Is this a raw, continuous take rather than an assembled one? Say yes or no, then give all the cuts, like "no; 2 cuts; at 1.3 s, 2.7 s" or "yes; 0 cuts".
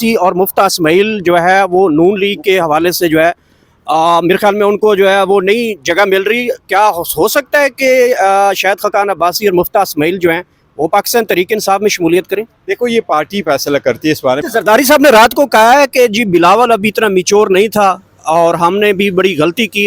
no; 1 cut; at 14.4 s